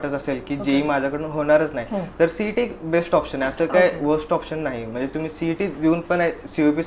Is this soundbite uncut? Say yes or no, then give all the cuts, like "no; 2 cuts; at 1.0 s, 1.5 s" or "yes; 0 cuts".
yes; 0 cuts